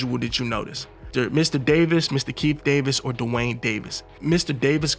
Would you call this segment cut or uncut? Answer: uncut